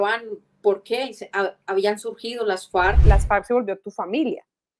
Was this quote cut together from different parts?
yes; 1 cut; at 3.0 s

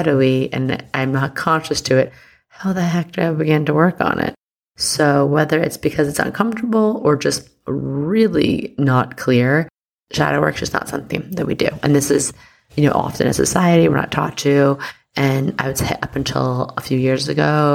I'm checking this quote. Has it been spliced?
no; 0 cuts

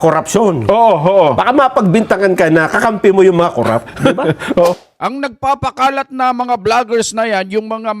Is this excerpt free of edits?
no; 1 cut; at 4.7 s

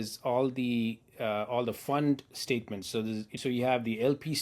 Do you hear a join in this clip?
yes; 1 cut; at 3.4 s

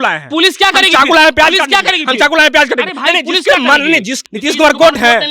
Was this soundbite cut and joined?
yes; 1 cut; at 4.1 s

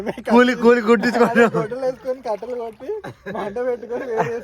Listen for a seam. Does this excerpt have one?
no; 0 cuts

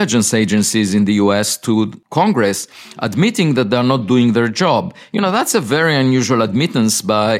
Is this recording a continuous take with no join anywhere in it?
no; 1 cut; at 2.0 s

